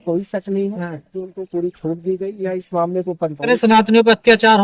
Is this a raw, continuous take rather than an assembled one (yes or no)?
no